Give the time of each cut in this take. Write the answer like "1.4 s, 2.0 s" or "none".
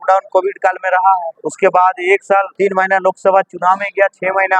1.4 s, 2.5 s